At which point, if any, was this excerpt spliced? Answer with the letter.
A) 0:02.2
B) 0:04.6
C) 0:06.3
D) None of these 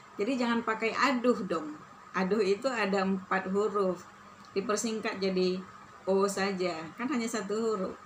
D